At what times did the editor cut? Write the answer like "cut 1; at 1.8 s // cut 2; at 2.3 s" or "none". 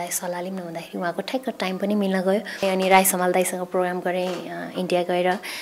cut 1; at 2.6 s